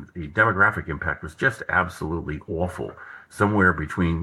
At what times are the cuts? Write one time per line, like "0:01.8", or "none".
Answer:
none